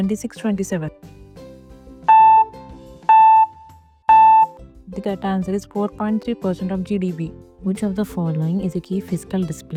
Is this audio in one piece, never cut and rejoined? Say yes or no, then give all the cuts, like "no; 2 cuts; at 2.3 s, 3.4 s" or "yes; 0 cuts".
yes; 0 cuts